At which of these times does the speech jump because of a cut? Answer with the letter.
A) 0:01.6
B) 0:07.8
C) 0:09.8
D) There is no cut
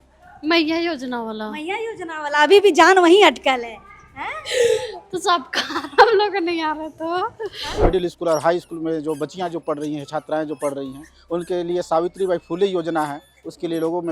B